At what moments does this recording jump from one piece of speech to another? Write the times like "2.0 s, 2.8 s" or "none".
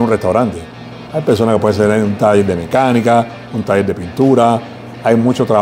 none

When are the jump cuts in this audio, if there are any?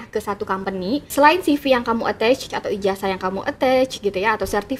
1.0 s, 2.5 s

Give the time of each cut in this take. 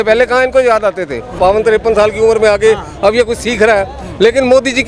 1.3 s

